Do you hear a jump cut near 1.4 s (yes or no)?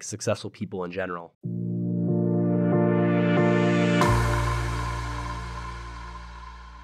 yes